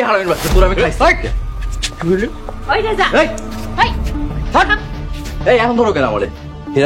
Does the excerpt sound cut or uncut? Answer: uncut